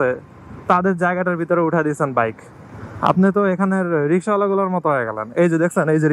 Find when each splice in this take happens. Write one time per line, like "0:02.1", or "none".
none